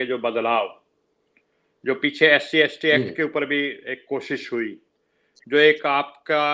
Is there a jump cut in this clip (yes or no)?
no